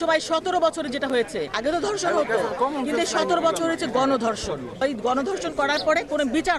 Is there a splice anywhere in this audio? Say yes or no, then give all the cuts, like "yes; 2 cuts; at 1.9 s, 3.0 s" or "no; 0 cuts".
yes; 2 cuts; at 1.5 s, 4.8 s